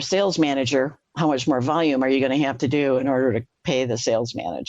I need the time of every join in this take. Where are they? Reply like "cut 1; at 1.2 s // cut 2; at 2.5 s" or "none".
cut 1; at 1.0 s // cut 2; at 3.5 s